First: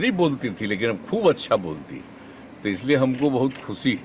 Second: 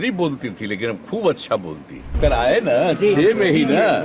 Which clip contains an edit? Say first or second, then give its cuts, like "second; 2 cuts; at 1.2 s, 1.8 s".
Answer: second; 1 cut; at 2.1 s